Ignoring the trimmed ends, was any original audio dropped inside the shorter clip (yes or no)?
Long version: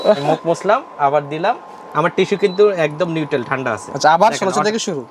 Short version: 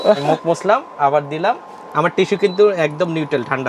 no